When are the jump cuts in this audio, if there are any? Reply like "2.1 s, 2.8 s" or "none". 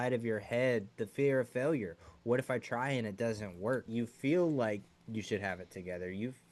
3.9 s